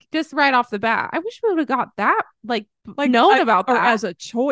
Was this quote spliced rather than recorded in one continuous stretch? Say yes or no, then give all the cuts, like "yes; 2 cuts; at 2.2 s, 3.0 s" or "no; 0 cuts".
yes; 1 cut; at 2.8 s